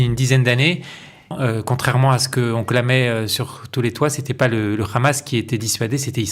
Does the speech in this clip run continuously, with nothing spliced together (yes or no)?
no